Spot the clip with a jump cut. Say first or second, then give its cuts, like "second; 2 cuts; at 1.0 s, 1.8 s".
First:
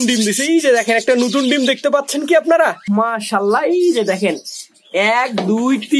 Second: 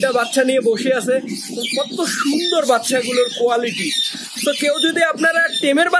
first; 1 cut; at 2.8 s